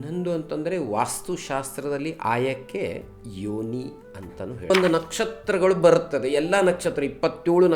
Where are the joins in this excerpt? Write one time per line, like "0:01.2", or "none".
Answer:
0:04.7